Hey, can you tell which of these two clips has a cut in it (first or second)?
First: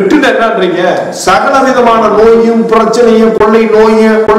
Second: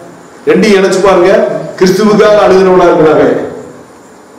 first